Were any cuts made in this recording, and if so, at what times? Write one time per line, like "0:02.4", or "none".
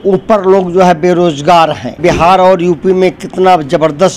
0:02.0